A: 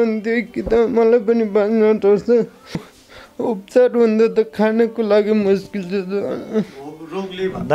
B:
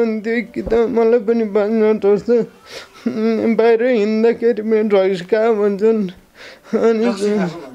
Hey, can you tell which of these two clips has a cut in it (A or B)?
A